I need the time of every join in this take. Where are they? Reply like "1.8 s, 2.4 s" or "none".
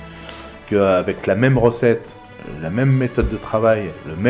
none